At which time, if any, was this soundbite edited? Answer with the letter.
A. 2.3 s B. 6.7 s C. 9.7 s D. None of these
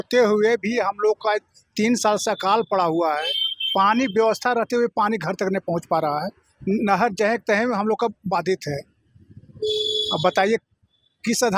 D